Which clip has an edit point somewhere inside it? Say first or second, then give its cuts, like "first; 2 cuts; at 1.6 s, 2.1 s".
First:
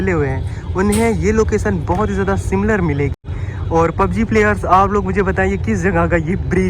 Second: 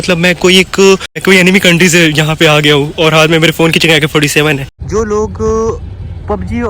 second; 2 cuts; at 1.2 s, 4.7 s